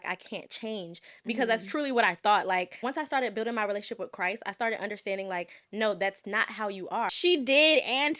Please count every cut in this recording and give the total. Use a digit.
2